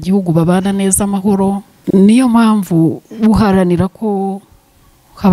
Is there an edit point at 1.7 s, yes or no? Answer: yes